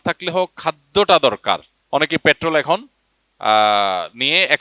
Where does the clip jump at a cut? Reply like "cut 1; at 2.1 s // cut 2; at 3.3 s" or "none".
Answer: cut 1; at 1.7 s